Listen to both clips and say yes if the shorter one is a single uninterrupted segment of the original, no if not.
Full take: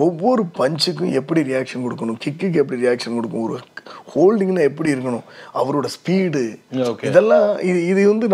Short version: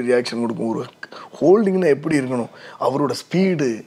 yes